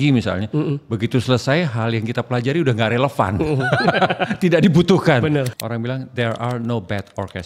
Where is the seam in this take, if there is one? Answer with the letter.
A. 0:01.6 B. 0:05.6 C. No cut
B